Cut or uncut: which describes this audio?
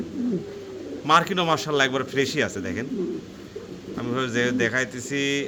uncut